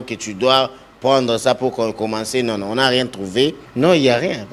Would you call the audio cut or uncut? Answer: cut